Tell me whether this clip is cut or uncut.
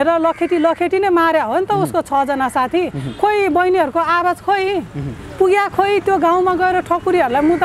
uncut